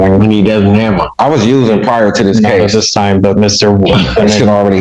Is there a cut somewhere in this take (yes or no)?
no